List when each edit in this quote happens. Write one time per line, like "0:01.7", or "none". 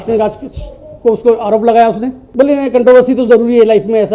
0:02.2

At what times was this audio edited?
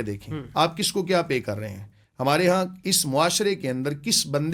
none

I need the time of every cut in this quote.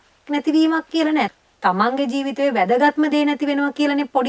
0:01.3

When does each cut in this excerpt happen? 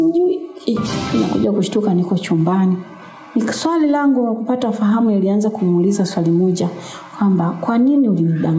0:01.0

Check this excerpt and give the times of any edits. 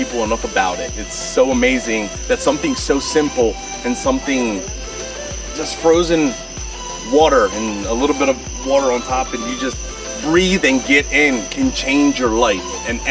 none

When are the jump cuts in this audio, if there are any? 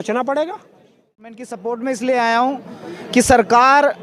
0:01.5

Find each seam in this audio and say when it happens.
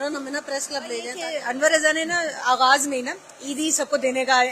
0:01.2

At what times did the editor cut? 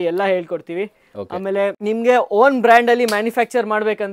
none

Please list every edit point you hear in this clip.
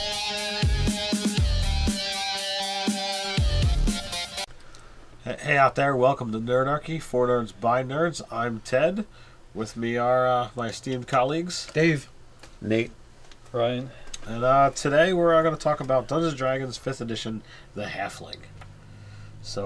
0:04.3

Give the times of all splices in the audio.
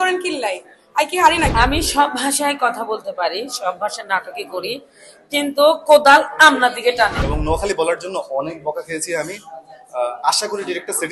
0:01.5
0:07.2

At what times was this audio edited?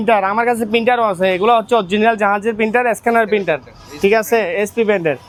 none

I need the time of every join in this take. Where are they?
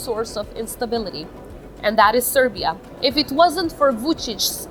0:02.9

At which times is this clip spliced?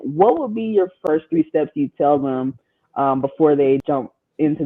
0:01.0
0:03.8

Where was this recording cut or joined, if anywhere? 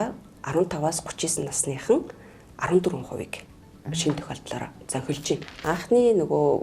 0:05.5

